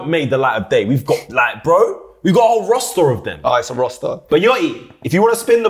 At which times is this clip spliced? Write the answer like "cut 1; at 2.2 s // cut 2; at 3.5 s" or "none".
cut 1; at 4.2 s